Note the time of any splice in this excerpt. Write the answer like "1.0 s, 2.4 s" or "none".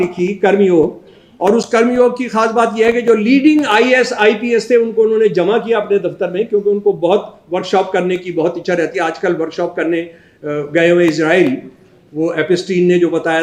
none